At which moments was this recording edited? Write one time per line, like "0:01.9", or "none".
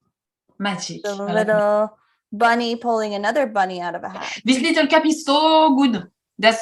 0:04.3